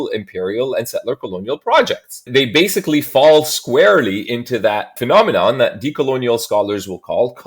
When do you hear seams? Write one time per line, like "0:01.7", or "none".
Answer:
0:02.1
0:05.0